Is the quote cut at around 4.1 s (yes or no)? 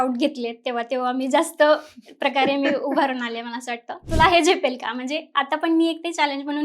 yes